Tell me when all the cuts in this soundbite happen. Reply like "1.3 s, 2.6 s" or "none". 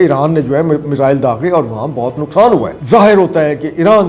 2.8 s